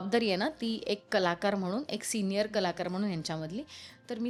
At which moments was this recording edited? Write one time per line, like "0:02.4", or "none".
none